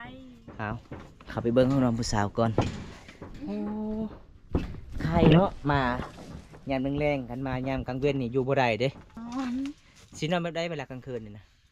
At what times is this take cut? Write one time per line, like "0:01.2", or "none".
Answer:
0:09.2